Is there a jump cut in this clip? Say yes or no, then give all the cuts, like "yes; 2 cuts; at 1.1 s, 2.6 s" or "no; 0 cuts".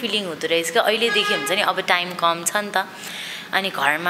no; 0 cuts